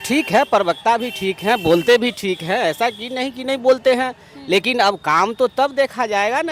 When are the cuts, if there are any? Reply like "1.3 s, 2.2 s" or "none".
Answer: none